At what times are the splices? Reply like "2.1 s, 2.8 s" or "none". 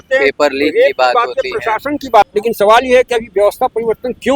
2.3 s

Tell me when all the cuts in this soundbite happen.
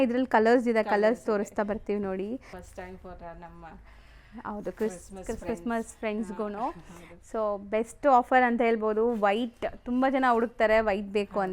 2.5 s

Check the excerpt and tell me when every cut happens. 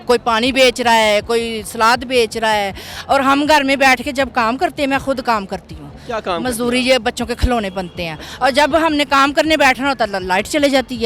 none

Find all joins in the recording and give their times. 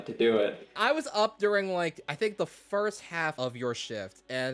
0.8 s, 3.3 s

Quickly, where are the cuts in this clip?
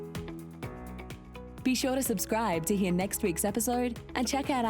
1.5 s

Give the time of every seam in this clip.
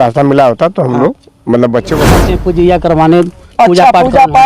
2.2 s

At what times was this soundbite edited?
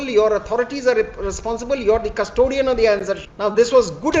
3.3 s

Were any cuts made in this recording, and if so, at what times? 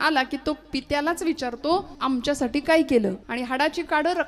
1.9 s, 3.2 s

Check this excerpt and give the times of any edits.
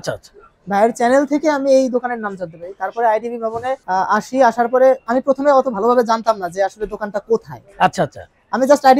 3.8 s

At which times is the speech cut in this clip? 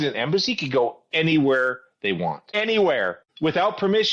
2.5 s, 3.2 s

